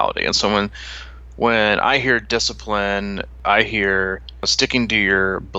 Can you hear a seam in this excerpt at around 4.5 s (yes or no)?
yes